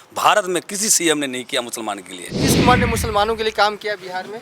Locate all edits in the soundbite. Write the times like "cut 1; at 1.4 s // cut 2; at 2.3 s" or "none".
cut 1; at 2.4 s

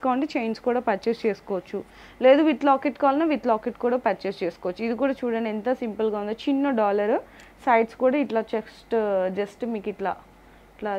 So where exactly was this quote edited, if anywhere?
none

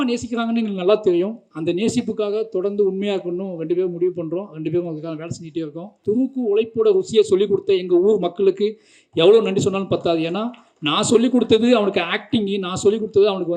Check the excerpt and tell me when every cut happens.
cut 1; at 5.9 s

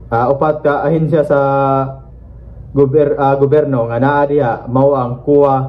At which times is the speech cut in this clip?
none

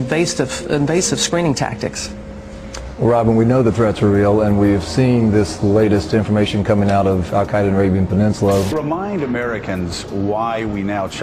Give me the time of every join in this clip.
none

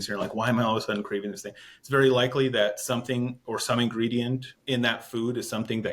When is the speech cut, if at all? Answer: cut 1; at 4.5 s

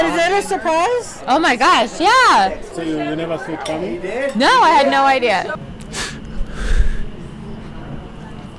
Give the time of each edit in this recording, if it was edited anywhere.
cut 1; at 2.7 s // cut 2; at 5.5 s

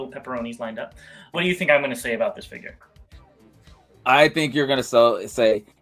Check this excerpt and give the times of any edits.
cut 1; at 1.3 s

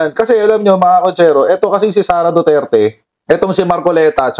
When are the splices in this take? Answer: cut 1; at 3.1 s

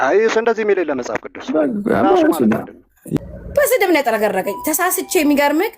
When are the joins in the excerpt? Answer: cut 1; at 3.2 s

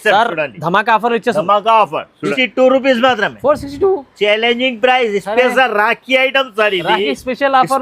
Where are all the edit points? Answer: cut 1; at 2.3 s

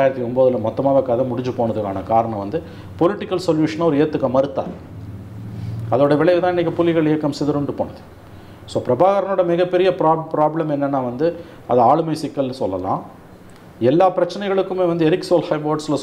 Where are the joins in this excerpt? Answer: none

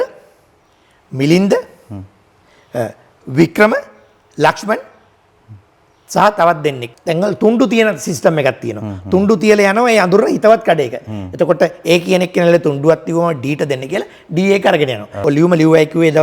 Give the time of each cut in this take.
cut 1; at 6.8 s // cut 2; at 15.1 s

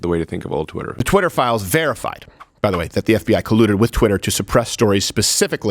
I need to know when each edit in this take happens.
cut 1; at 1.0 s

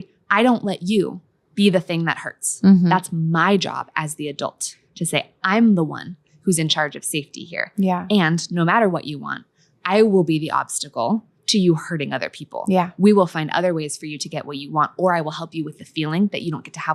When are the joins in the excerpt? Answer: none

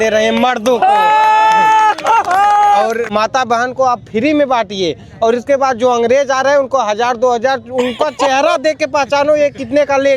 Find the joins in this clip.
cut 1; at 3.1 s

